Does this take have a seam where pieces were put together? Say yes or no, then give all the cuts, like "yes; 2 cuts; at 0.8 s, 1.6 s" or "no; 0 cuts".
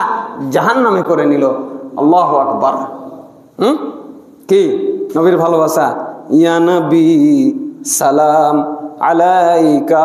no; 0 cuts